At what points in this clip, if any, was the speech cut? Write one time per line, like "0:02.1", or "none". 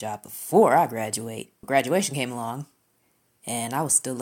0:01.6